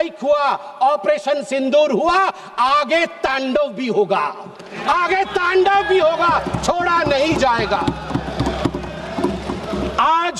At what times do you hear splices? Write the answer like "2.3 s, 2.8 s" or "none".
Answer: none